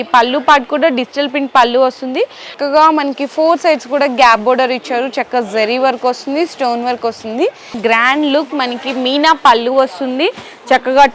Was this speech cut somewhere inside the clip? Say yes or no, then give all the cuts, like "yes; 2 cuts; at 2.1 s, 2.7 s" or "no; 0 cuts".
yes; 2 cuts; at 2.5 s, 7.8 s